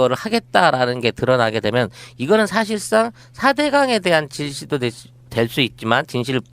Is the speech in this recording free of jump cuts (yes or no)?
no